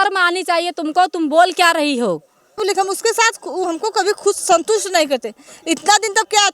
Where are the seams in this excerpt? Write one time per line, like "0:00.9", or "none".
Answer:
0:02.6